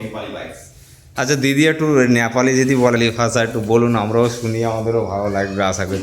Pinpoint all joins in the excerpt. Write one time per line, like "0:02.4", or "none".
0:03.0